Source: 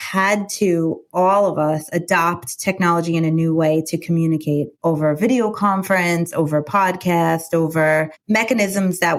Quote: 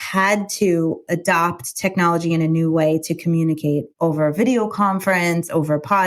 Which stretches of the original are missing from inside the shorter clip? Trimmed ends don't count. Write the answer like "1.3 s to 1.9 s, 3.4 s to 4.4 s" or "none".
1.0 s to 1.9 s